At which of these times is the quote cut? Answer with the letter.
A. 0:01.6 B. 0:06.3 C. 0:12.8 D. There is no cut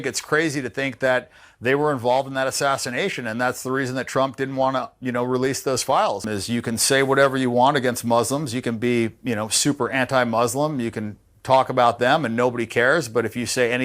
B